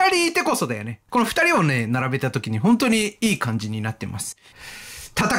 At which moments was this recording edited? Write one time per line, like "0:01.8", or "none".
0:00.9
0:04.4